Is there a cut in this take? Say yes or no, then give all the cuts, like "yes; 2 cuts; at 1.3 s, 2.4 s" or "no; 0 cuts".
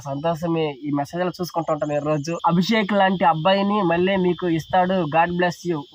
yes; 1 cut; at 2.3 s